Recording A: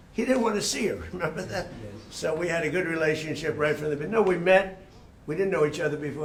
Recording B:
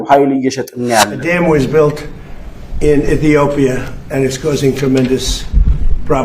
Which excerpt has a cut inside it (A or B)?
B